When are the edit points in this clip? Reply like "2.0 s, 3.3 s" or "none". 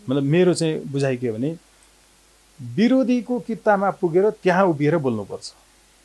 none